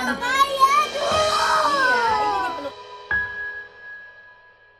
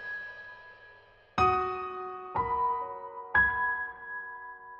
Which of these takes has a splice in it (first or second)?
first